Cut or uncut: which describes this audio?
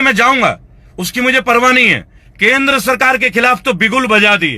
cut